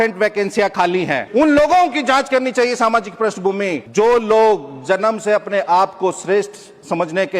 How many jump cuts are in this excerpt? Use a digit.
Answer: 2